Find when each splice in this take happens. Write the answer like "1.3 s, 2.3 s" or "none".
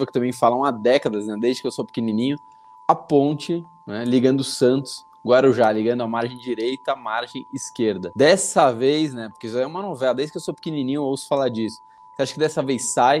none